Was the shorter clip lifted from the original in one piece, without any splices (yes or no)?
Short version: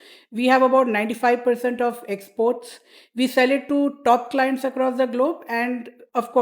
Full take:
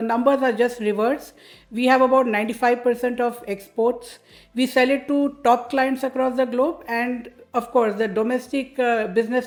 yes